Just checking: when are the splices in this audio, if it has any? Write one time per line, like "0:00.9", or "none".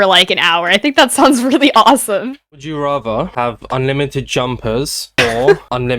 0:02.4